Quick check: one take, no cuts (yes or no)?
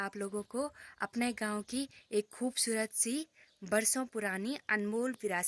yes